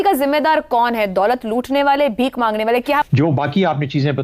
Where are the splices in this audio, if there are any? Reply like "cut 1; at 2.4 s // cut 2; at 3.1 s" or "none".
cut 1; at 3.0 s